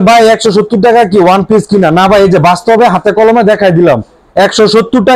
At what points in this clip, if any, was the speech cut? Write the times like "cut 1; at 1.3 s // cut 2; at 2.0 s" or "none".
none